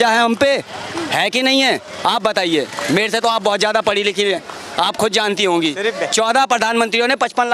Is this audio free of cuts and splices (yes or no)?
yes